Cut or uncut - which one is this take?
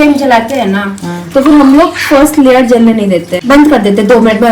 cut